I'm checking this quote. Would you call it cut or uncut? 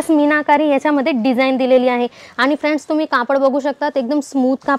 uncut